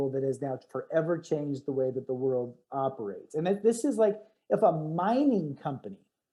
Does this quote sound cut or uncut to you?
uncut